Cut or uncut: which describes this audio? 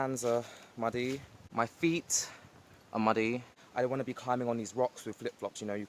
cut